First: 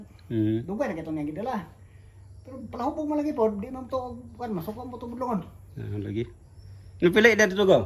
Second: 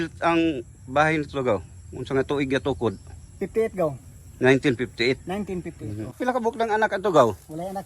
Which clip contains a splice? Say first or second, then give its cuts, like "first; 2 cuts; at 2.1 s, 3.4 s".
second; 1 cut; at 6.1 s